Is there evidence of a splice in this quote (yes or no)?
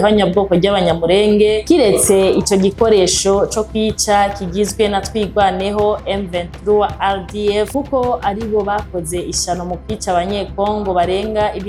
no